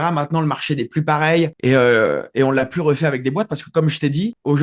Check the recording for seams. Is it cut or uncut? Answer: uncut